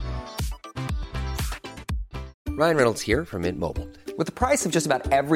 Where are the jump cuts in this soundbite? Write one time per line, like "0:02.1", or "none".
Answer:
0:02.3